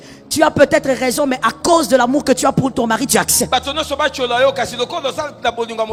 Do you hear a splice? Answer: no; 0 cuts

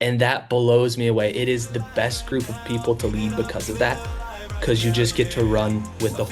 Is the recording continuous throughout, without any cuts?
yes; 0 cuts

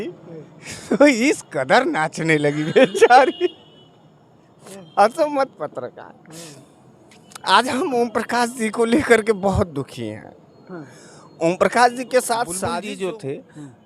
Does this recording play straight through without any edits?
no; 1 cut; at 12.7 s

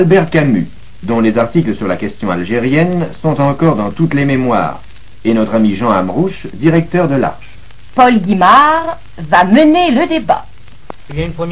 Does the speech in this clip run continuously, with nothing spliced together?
no; 1 cut; at 5.6 s

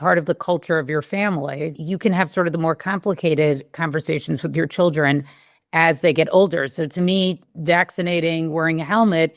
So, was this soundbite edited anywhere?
yes; 1 cut; at 1.7 s

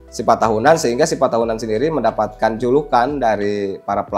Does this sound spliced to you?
no; 0 cuts

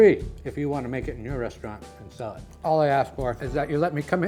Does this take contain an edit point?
no; 0 cuts

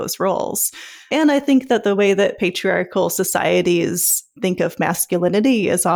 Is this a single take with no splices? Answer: no; 2 cuts; at 1.1 s, 4.3 s

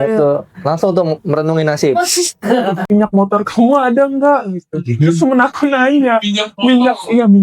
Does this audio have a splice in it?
yes; 1 cut; at 2.8 s

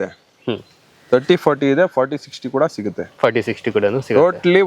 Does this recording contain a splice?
no; 0 cuts

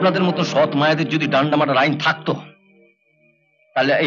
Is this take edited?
no; 0 cuts

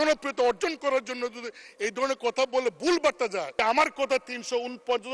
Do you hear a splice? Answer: yes; 1 cut; at 3.5 s

